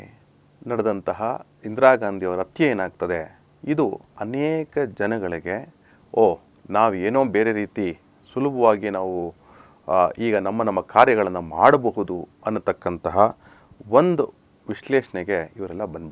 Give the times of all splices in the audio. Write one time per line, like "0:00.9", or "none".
none